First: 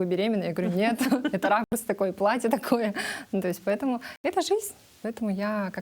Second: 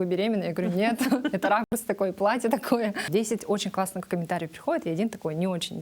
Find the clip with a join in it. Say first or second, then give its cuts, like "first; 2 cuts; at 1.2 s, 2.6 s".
second; 1 cut; at 3.0 s